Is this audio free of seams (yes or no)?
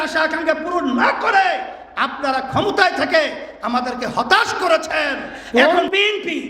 no